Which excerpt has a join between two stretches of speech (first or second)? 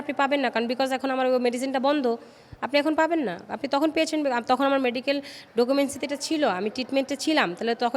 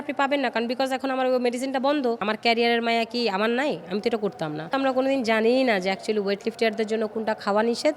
second